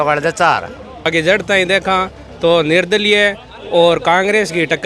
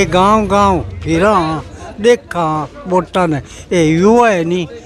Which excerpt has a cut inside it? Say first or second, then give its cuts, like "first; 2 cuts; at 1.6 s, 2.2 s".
first; 1 cut; at 1.1 s